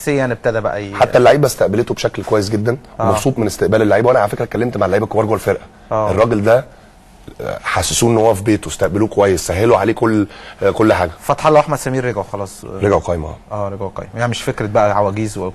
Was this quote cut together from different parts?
yes; 1 cut; at 5.3 s

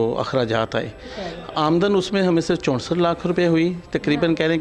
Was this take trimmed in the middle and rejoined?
no; 0 cuts

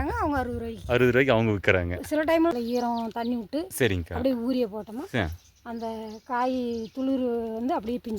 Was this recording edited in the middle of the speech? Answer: yes; 1 cut; at 2.5 s

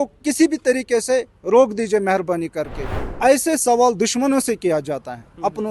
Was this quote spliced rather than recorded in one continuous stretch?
yes; 1 cut; at 2.8 s

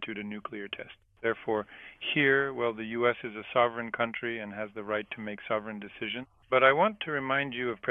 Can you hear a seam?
yes; 2 cuts; at 1.0 s, 6.4 s

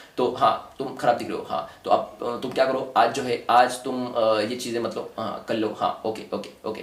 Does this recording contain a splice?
no; 0 cuts

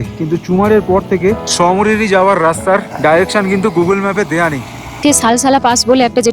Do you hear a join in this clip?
yes; 3 cuts; at 1.5 s, 2.9 s, 4.8 s

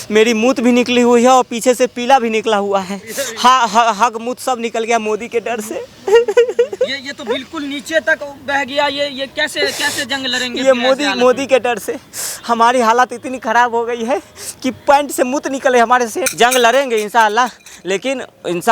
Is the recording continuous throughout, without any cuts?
no; 1 cut; at 16.2 s

